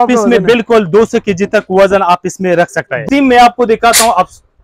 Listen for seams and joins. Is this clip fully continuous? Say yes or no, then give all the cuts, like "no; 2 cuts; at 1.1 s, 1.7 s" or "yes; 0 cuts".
no; 1 cut; at 3.0 s